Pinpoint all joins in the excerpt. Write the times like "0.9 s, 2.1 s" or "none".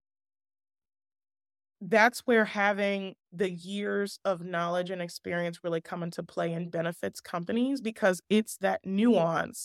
none